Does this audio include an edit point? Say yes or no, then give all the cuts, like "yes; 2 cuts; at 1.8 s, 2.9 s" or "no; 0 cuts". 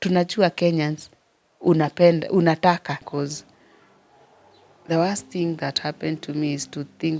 yes; 1 cut; at 3.0 s